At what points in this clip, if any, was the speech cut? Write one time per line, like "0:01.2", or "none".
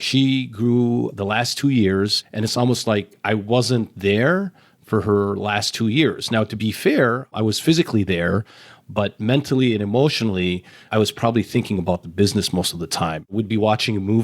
0:07.2
0:13.3